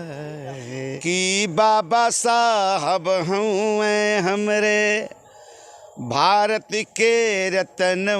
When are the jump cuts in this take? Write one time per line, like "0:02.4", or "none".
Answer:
0:01.0